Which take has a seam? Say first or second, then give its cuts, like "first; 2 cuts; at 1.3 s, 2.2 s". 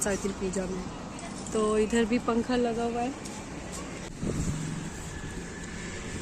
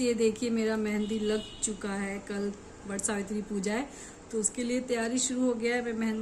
first; 1 cut; at 4.1 s